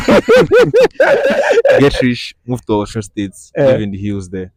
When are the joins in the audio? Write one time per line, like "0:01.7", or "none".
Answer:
none

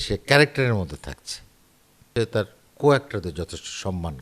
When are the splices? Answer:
0:02.1

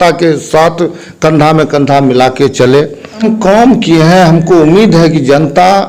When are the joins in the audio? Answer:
0:03.2

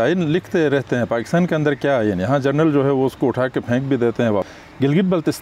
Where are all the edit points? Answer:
0:04.5

